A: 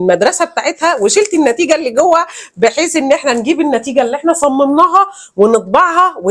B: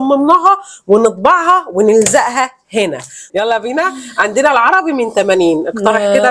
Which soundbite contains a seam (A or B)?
B